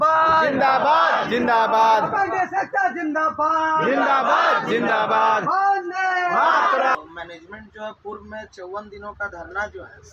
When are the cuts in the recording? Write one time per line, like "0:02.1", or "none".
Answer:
0:07.0